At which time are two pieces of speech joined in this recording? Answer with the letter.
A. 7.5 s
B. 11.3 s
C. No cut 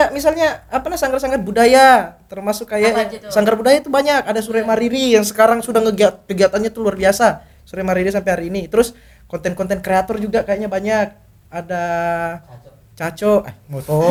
C